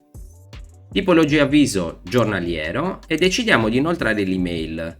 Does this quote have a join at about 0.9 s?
yes; 1 cut; at 0.9 s

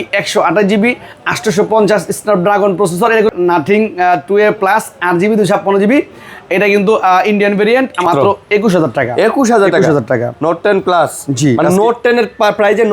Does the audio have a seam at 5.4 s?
no; 2 cuts; at 3.3 s, 8.1 s

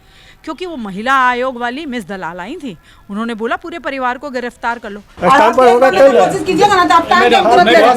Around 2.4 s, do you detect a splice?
no; 0 cuts

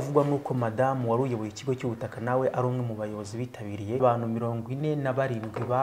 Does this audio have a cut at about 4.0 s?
yes; 1 cut; at 4.0 s

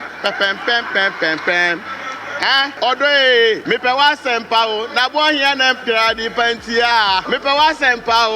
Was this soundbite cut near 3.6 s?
yes; 3 cuts; at 2.7 s, 3.6 s, 7.2 s

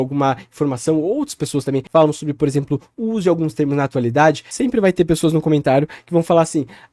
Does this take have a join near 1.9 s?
yes; 2 cuts; at 1.9 s, 4.5 s

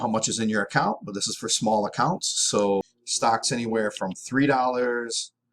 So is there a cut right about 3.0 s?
yes; 1 cut; at 3.0 s

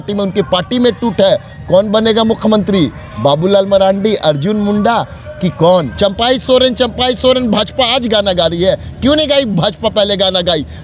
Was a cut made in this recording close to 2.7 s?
no; 1 cut; at 5.9 s

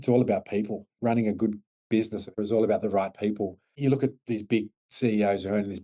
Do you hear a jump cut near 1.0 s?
yes; 4 cuts; at 1.0 s, 2.3 s, 3.6 s, 4.8 s

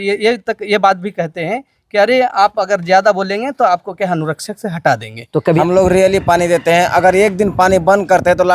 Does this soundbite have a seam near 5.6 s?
yes; 1 cut; at 5.6 s

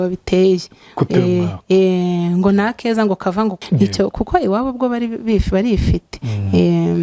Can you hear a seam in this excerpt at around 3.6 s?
yes; 1 cut; at 3.6 s

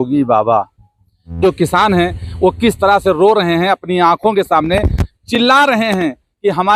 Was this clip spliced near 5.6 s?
no; 0 cuts

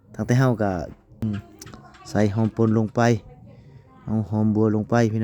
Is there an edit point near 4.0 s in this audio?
no; 1 cut; at 1.2 s

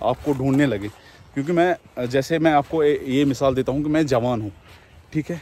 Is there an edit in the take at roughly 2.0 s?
no; 0 cuts

